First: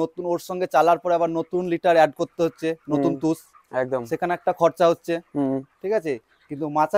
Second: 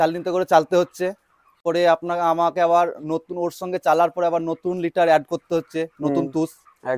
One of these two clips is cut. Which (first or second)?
second